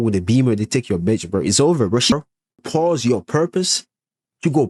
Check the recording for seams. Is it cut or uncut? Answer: cut